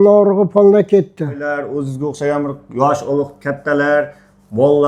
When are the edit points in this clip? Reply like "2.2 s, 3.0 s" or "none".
1.4 s